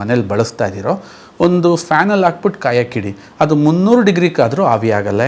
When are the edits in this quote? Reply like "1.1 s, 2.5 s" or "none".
none